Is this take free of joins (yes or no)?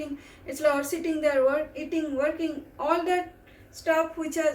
yes